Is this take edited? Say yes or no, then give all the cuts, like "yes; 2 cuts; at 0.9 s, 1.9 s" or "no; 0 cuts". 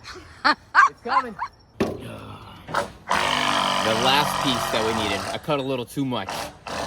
yes; 1 cut; at 1.6 s